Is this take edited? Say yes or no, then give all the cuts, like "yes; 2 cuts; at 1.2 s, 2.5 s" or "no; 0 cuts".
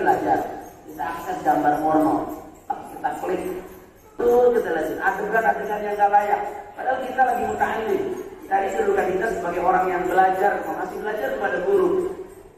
yes; 1 cut; at 4.1 s